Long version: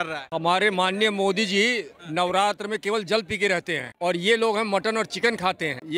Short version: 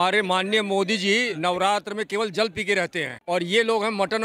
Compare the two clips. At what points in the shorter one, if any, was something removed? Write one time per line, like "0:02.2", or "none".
0:01.3